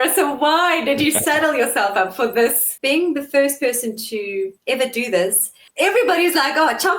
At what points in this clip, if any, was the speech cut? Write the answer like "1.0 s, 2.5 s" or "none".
2.7 s, 4.6 s, 5.6 s